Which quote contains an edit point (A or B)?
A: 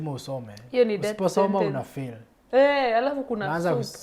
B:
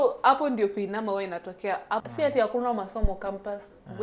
B